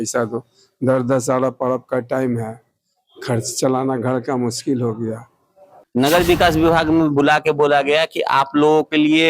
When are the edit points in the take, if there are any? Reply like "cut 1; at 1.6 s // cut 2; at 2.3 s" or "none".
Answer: cut 1; at 5.7 s